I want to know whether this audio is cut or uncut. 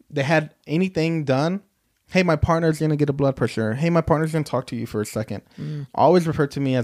uncut